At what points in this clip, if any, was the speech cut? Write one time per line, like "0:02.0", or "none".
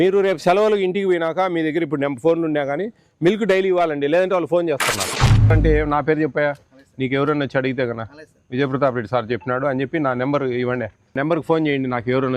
0:05.5
0:11.2